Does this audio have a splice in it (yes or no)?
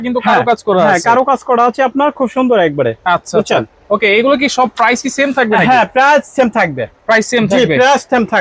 no